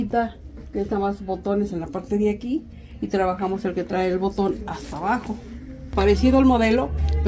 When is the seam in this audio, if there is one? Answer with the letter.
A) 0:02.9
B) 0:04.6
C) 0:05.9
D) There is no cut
C